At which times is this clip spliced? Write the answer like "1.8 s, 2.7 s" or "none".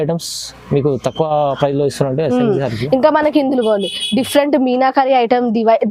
none